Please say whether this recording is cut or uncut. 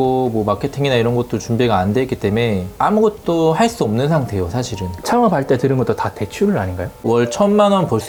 uncut